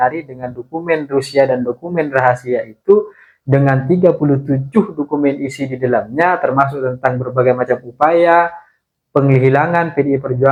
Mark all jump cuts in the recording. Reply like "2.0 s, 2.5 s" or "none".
none

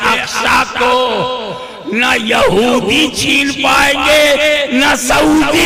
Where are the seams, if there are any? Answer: none

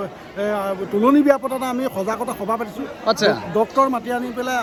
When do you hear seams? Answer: none

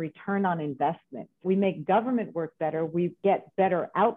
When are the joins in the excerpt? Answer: 1.4 s, 3.2 s

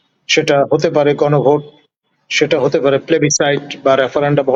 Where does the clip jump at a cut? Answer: none

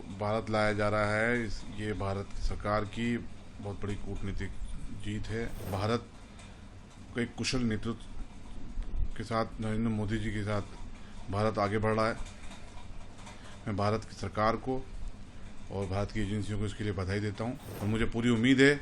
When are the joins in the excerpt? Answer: 5.7 s, 17.7 s

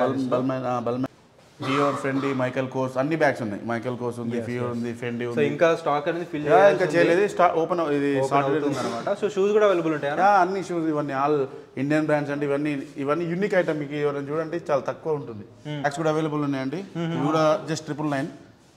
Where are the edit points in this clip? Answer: 1.1 s, 15.6 s

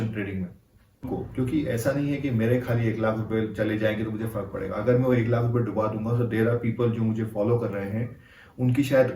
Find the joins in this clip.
1.0 s

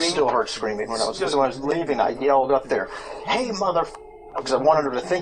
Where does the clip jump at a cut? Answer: 1.2 s, 4.4 s

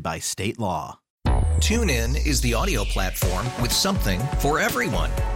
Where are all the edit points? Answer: 1.0 s

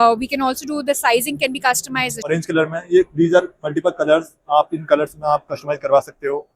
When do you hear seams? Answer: 2.3 s

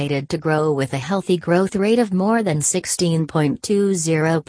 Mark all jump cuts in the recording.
none

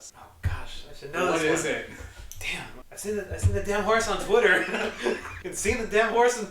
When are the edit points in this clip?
2.7 s, 5.4 s

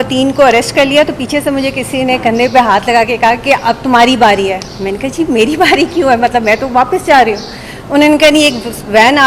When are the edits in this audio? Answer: none

